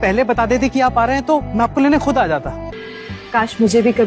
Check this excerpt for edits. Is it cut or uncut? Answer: cut